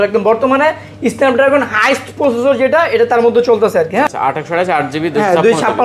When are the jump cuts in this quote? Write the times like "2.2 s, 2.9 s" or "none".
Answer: 4.1 s